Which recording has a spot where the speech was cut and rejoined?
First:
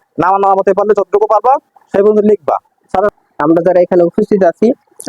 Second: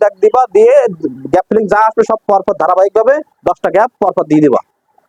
first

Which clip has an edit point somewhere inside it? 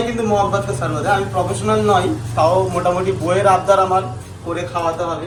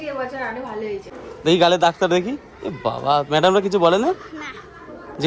second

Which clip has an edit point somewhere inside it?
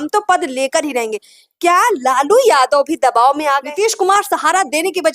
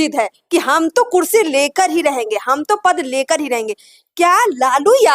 first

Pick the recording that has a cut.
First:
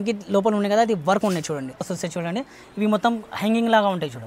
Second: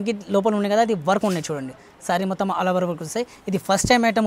first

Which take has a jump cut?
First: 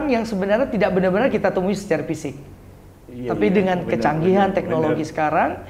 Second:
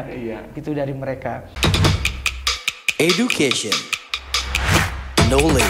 second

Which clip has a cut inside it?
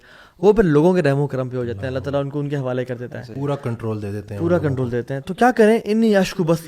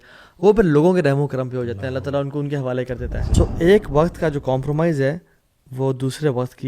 second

